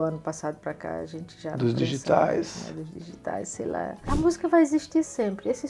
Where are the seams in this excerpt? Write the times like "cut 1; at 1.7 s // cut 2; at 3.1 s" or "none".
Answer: cut 1; at 4.0 s